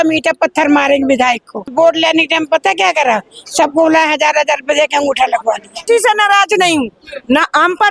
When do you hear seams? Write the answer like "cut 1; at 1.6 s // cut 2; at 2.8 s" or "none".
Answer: cut 1; at 1.6 s // cut 2; at 5.8 s